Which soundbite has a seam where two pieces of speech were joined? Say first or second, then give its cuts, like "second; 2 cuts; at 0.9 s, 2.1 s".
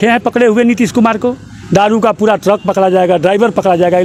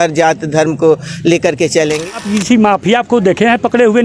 second; 1 cut; at 2.1 s